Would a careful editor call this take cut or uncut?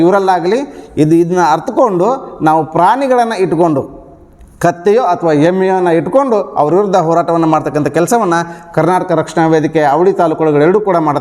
uncut